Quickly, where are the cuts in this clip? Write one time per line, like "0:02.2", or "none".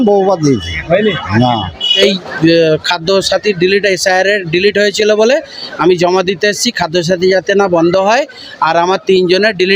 0:02.0